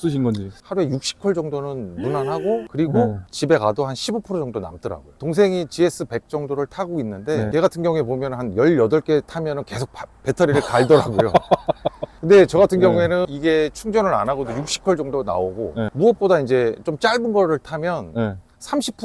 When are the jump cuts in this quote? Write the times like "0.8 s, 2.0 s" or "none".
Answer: none